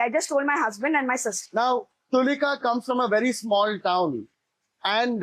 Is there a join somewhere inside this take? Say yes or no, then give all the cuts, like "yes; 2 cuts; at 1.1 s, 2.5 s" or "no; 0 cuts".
yes; 1 cut; at 1.3 s